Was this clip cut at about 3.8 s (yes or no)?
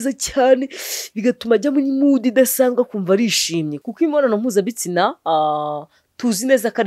yes